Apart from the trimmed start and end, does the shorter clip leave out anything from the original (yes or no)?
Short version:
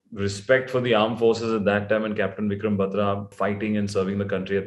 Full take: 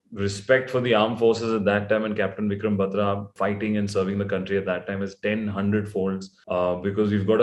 no